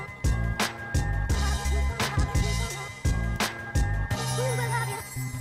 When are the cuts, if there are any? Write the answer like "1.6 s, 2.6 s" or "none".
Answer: none